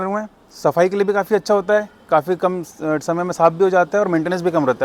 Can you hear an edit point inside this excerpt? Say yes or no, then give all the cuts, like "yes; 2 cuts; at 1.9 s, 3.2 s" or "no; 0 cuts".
no; 0 cuts